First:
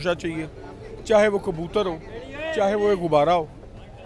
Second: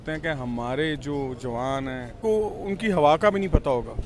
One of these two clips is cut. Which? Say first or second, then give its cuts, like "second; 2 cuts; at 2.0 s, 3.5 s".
second; 1 cut; at 2.2 s